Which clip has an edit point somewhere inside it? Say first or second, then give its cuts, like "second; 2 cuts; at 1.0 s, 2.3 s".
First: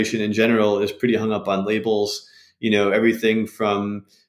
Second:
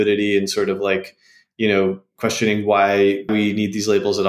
second; 1 cut; at 3.3 s